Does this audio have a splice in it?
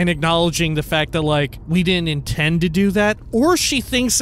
yes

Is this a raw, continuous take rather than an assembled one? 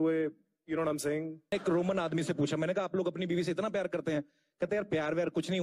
no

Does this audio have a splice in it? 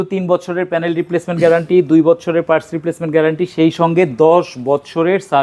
no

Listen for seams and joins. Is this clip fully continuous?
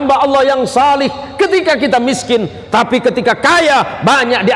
yes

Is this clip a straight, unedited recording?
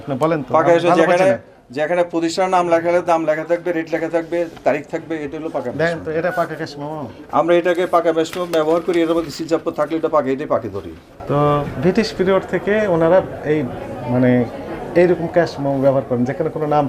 no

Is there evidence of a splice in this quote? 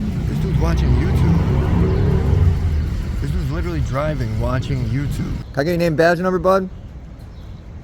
yes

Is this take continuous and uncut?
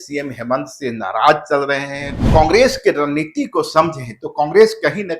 no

